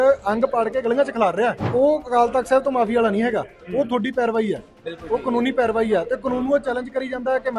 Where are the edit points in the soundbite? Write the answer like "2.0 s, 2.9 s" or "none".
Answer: 1.6 s